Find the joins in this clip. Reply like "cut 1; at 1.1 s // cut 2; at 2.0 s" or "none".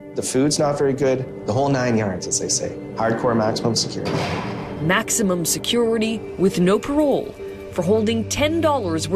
none